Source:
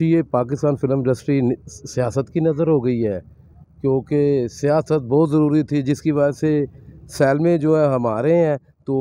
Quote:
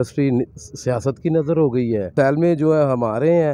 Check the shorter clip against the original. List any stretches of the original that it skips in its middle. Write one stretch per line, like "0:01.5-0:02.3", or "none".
0:03.2-0:07.1